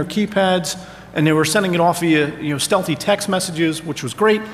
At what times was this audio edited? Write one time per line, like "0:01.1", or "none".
0:01.8